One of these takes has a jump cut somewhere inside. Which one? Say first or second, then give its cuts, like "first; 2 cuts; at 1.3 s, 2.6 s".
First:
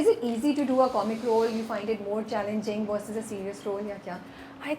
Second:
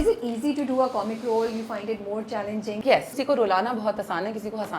second; 1 cut; at 3.1 s